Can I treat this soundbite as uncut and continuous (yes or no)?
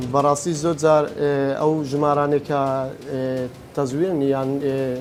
yes